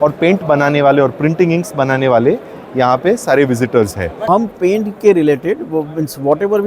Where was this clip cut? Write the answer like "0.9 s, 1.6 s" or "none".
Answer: 4.3 s